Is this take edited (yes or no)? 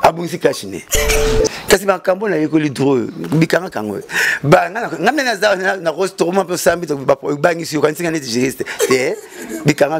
yes